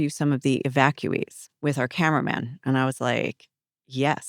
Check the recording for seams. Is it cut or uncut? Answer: cut